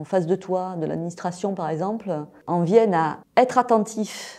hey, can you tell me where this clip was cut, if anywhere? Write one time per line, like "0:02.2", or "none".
0:02.3
0:03.2